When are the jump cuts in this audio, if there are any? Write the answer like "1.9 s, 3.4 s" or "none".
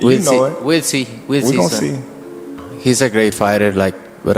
2.4 s